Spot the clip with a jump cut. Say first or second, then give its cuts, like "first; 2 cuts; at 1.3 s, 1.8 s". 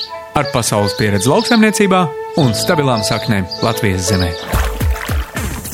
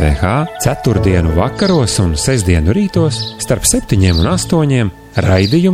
first; 1 cut; at 4.8 s